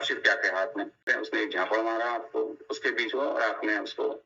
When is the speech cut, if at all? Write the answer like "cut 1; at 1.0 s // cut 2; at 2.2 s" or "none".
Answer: cut 1; at 1.1 s